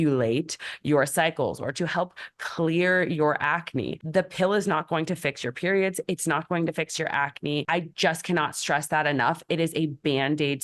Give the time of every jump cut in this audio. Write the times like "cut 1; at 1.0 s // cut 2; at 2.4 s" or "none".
cut 1; at 4.0 s